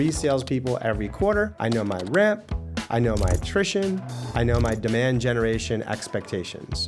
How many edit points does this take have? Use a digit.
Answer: 0